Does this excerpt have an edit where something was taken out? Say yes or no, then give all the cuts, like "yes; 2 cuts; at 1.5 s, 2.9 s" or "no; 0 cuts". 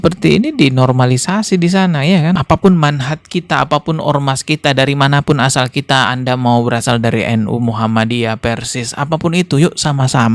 yes; 1 cut; at 2.4 s